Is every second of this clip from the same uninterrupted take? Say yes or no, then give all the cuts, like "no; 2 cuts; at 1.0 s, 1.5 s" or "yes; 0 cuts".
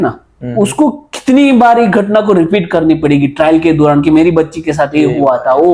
yes; 0 cuts